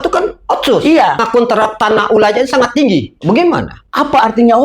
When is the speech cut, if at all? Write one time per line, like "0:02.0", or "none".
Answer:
0:01.2